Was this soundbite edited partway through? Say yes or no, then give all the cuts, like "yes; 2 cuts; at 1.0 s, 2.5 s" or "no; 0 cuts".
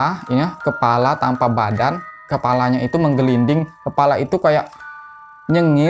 yes; 2 cuts; at 2.3 s, 3.8 s